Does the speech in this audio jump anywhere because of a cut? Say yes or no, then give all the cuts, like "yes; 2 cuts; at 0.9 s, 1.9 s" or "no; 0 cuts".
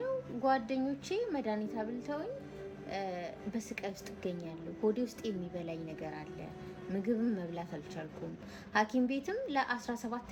no; 0 cuts